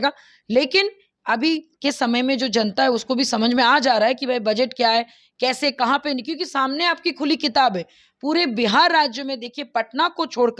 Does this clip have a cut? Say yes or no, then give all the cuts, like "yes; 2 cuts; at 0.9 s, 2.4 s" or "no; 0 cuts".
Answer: no; 0 cuts